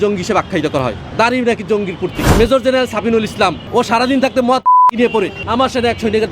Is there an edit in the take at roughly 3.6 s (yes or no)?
yes